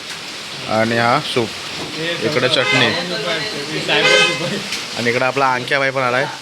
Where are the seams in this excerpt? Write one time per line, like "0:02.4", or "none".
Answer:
none